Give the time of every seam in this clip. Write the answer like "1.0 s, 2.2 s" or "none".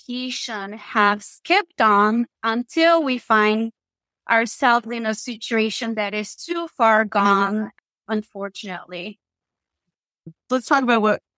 10.5 s

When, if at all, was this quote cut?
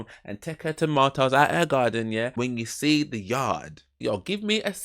2.3 s, 4.0 s

